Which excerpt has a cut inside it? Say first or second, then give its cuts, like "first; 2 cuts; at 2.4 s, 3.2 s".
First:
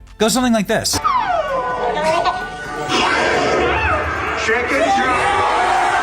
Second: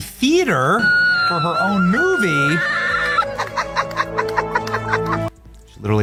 first; 1 cut; at 0.9 s